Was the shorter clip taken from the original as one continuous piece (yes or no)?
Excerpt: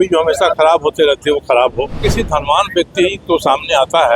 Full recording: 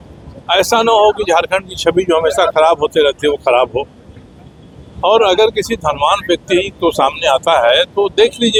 no